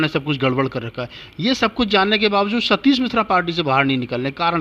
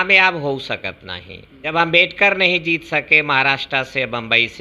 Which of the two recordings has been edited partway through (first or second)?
second